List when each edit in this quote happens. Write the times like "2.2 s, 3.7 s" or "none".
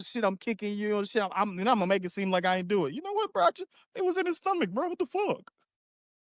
none

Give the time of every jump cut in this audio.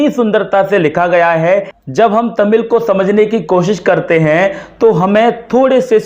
1.7 s

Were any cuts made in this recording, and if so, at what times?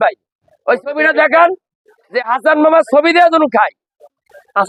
none

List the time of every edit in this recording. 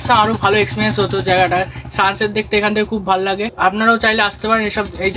3.5 s

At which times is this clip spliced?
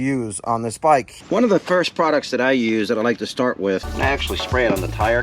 1.1 s, 3.9 s

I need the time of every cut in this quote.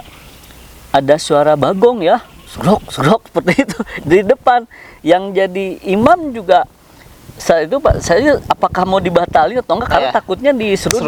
none

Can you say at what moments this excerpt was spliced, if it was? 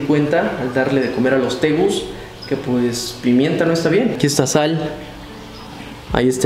none

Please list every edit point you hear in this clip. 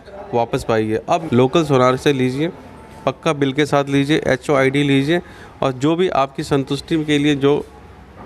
1.2 s

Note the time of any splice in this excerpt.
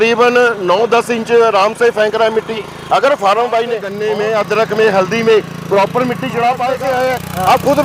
3.9 s, 6.8 s

